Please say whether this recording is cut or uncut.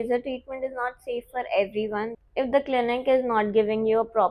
cut